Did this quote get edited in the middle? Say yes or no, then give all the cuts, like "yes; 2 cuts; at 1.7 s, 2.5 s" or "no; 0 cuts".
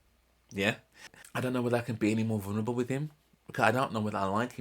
yes; 1 cut; at 1.1 s